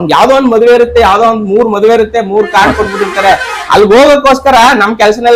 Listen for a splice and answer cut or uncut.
uncut